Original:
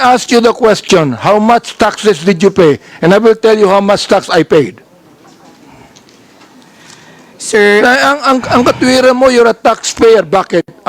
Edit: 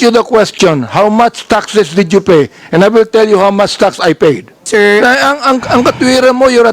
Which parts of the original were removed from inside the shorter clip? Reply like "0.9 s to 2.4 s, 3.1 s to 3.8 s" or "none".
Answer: 4.8 s to 7.3 s